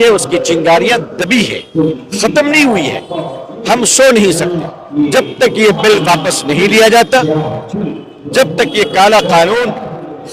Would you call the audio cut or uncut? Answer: uncut